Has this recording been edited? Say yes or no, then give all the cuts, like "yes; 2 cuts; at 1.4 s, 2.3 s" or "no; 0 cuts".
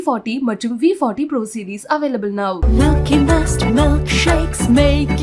no; 0 cuts